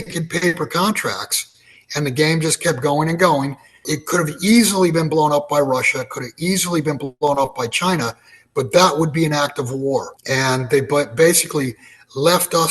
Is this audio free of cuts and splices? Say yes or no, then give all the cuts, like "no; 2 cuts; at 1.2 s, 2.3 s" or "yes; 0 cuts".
no; 2 cuts; at 3.9 s, 10.1 s